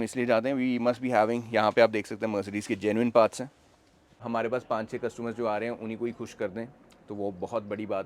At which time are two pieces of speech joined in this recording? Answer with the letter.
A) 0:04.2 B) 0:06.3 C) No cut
A